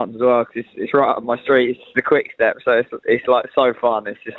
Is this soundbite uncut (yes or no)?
no